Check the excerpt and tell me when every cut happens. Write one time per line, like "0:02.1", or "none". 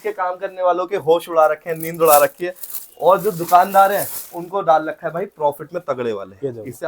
none

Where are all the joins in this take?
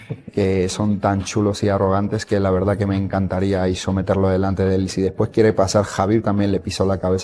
0:04.9

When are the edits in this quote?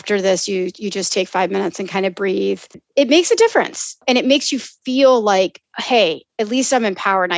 0:02.8
0:04.0

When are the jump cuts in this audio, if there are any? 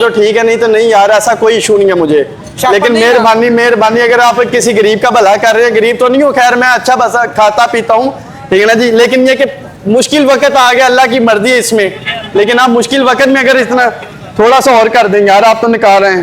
none

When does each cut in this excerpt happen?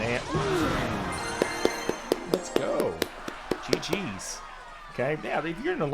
none

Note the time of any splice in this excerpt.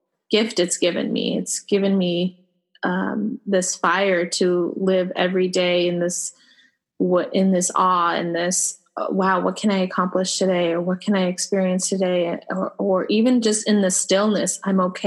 none

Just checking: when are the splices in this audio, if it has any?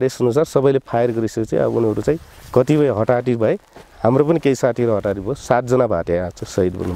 none

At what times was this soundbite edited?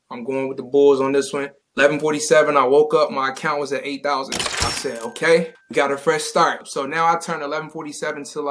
0:06.7

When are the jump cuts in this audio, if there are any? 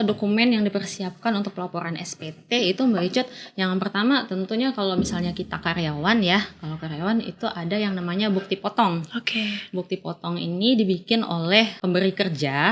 0:11.8

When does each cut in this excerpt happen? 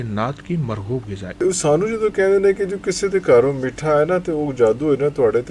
0:01.4

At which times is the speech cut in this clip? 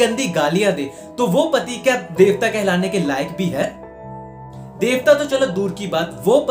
none

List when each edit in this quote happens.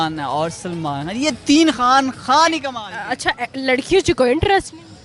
none

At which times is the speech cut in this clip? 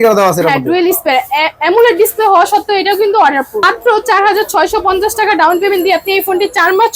0:03.6

